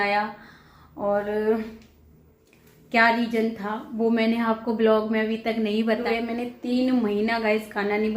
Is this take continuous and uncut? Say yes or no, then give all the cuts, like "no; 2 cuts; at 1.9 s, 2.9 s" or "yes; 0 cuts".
no; 1 cut; at 6.0 s